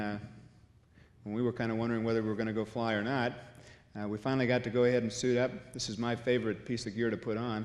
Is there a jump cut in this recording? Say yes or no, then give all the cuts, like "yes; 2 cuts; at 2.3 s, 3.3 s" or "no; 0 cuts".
no; 0 cuts